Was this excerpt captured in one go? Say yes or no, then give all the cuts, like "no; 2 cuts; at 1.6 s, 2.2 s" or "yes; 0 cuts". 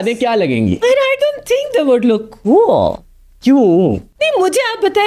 no; 1 cut; at 4.1 s